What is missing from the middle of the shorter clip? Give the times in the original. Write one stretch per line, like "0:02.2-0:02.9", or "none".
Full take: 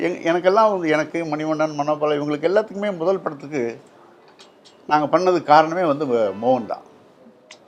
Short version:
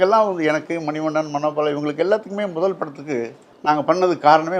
0:03.9-0:04.7